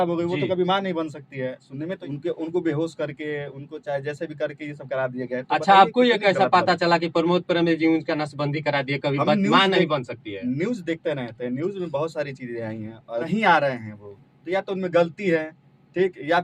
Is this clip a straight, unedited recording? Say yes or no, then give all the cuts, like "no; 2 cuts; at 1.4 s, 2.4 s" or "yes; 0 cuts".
no; 2 cuts; at 2.0 s, 13.3 s